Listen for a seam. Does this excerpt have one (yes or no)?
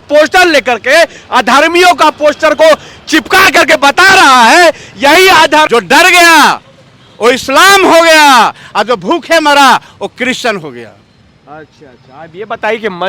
yes